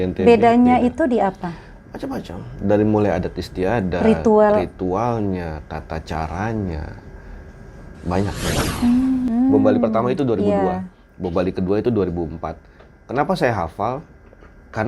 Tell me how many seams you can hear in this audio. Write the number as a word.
one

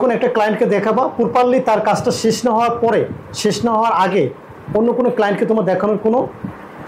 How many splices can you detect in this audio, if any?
zero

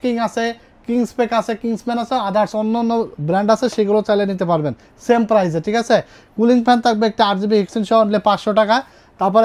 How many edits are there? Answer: zero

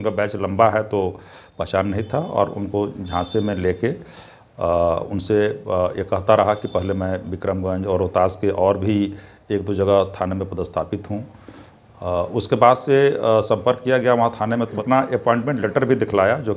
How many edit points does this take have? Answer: one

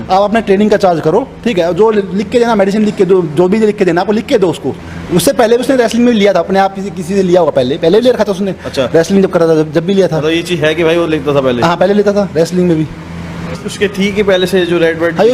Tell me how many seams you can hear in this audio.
two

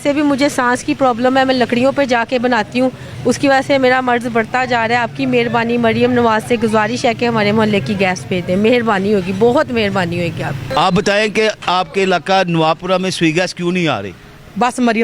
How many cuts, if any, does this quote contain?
zero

